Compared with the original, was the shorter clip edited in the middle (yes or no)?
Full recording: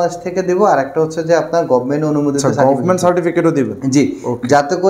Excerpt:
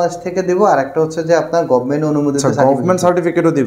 no